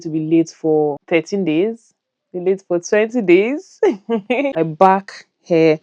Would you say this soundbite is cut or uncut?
cut